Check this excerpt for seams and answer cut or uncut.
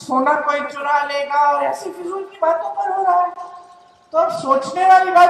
uncut